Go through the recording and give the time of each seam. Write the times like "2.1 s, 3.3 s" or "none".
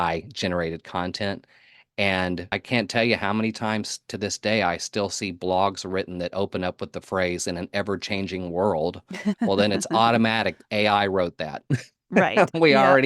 2.5 s